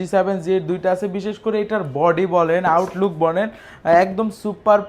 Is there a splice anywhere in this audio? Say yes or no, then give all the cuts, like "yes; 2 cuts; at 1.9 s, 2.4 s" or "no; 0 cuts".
no; 0 cuts